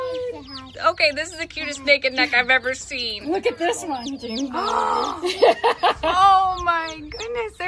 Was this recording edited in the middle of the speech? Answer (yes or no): no